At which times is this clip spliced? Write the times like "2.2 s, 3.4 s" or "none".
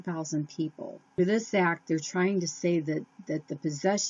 1.2 s